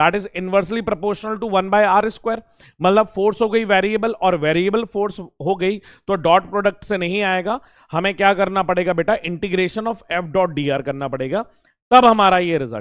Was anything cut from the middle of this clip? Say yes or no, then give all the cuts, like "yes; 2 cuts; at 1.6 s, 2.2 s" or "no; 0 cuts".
no; 0 cuts